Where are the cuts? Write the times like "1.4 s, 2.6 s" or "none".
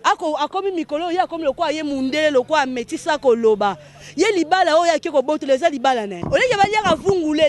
6.1 s